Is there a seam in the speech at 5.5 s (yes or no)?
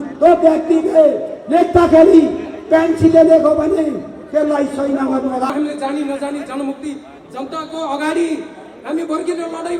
yes